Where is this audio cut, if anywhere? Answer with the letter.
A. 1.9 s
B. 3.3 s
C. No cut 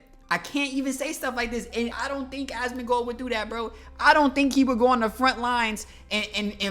A